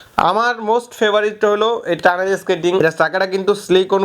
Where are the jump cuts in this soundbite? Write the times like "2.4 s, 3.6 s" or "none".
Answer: 2.8 s